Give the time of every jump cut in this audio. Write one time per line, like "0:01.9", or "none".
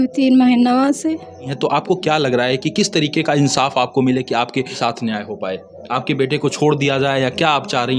0:01.6
0:04.7